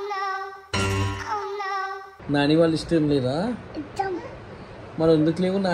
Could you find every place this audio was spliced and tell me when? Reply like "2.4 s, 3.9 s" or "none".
none